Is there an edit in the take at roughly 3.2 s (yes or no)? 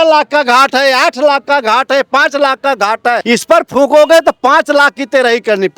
yes